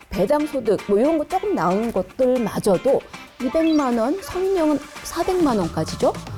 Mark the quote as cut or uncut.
uncut